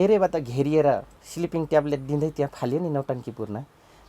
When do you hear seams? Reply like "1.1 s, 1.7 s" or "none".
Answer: 1.2 s